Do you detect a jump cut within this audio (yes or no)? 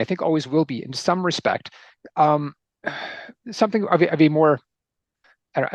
no